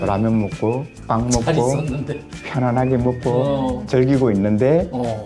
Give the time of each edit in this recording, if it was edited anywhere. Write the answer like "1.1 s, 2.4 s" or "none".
0.9 s

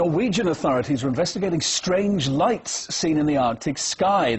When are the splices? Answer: 2.4 s

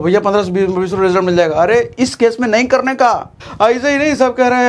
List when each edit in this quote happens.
3.4 s

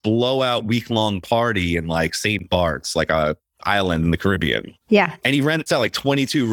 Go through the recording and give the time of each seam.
none

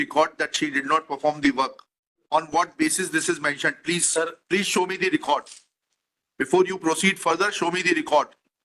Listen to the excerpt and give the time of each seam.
2.2 s

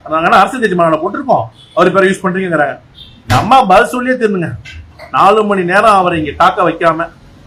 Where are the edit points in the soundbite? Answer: none

